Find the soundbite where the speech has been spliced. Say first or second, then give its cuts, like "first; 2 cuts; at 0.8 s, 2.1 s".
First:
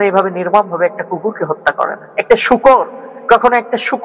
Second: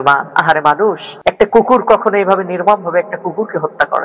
second; 1 cut; at 1.1 s